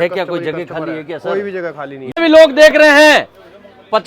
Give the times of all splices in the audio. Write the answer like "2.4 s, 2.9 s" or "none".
2.2 s